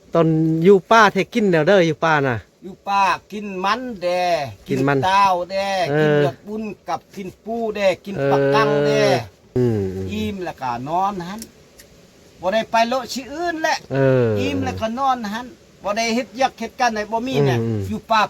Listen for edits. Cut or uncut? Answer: cut